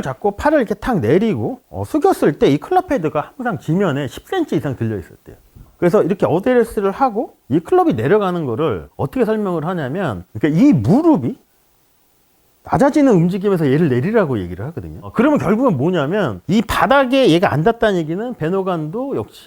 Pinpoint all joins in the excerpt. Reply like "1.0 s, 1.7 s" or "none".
none